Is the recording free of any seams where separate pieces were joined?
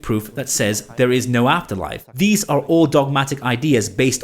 no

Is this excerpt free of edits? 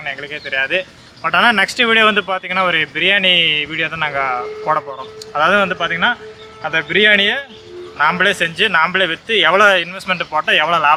yes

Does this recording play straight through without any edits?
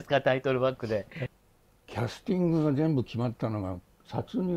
no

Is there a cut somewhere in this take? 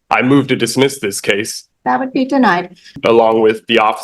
yes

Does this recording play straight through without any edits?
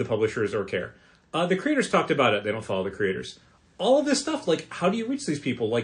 yes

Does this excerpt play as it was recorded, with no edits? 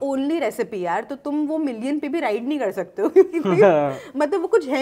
yes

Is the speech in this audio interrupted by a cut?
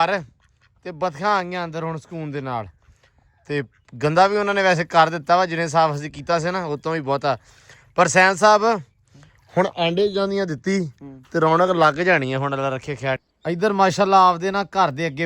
yes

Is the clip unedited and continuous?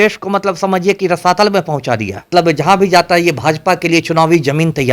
no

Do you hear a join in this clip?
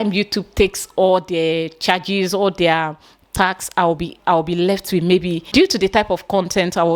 yes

